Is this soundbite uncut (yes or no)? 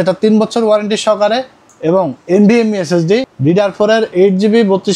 no